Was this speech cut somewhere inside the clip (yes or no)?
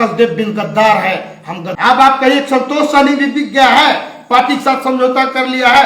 yes